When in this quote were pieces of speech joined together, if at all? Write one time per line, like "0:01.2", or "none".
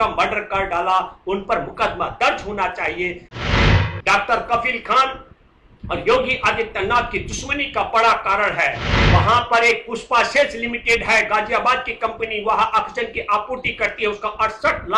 0:03.5
0:08.9

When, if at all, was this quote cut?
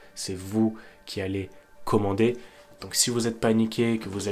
none

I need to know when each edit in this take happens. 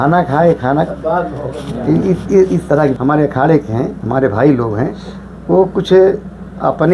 0:02.9

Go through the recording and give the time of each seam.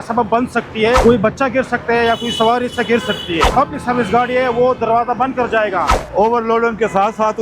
0:01.0
0:03.5
0:06.0

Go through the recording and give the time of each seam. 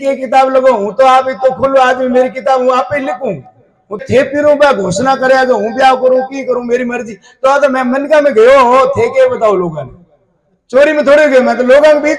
0:04.0

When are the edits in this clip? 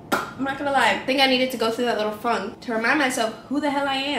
0:01.0
0:02.5

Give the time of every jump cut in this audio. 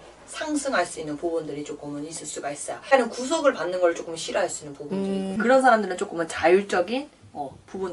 0:02.9

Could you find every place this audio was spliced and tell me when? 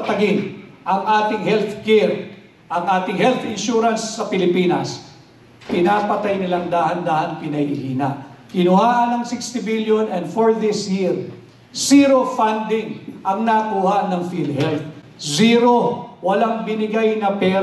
none

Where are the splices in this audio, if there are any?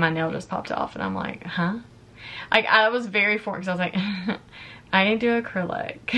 none

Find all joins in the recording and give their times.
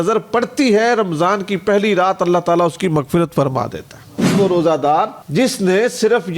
0:04.3

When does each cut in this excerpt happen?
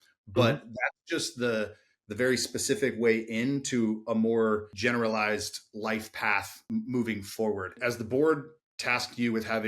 0:04.7
0:06.6
0:07.8

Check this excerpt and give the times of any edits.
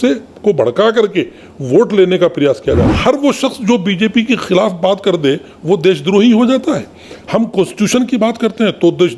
0:02.9

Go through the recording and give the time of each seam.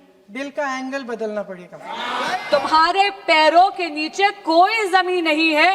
0:02.4

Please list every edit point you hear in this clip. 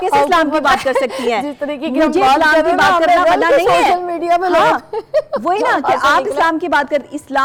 none

